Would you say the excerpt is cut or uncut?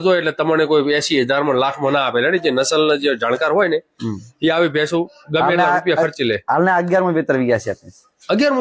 uncut